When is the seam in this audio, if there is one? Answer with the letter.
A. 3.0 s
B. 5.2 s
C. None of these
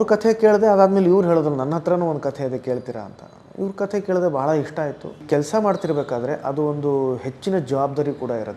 B